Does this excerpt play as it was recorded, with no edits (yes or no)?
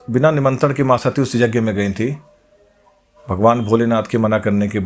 yes